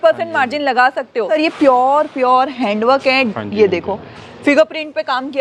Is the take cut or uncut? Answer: cut